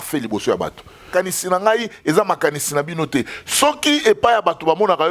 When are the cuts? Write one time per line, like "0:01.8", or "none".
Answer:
0:01.1